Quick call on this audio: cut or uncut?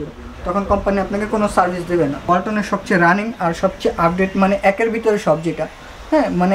cut